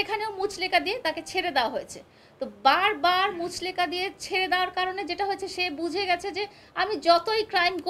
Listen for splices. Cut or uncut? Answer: uncut